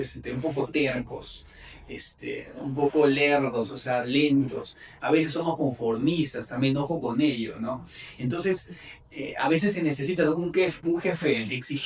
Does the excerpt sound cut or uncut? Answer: uncut